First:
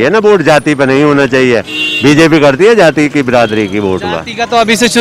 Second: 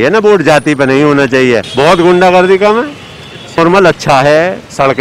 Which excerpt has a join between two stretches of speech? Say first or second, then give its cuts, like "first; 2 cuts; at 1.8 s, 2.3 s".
second; 2 cuts; at 1.7 s, 3.6 s